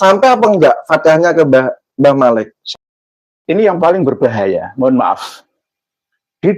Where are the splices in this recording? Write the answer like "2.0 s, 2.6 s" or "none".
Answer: 2.8 s